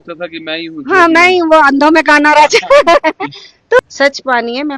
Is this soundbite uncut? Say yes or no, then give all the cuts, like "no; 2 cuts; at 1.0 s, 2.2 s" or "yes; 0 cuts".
no; 1 cut; at 3.8 s